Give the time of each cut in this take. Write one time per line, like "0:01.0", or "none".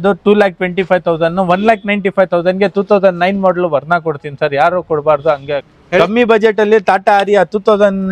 0:05.7